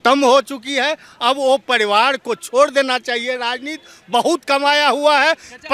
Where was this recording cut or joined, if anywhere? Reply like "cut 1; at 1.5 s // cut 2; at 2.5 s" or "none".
none